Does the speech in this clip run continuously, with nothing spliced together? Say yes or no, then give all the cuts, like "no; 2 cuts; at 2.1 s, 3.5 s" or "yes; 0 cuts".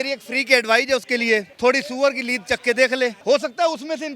no; 2 cuts; at 1.5 s, 3.2 s